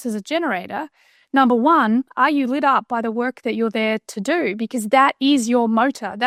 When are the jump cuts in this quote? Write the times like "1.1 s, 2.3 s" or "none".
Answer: none